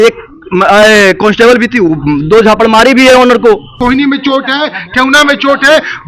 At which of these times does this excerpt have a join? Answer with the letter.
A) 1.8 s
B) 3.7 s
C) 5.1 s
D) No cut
B